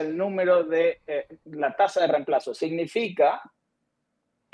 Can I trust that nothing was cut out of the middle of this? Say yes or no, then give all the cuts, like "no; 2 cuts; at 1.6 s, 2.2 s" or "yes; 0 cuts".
yes; 0 cuts